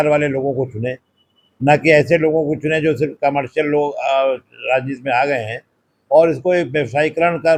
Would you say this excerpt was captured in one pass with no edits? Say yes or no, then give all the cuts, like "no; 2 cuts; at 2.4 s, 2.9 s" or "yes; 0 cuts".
yes; 0 cuts